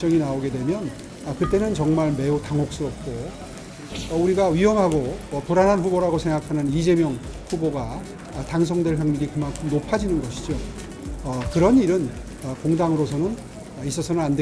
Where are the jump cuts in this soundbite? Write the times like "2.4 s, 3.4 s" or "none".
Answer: 3.7 s